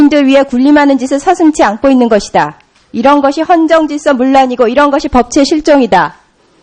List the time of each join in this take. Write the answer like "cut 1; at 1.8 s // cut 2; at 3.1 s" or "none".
none